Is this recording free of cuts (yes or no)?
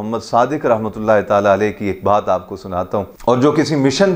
no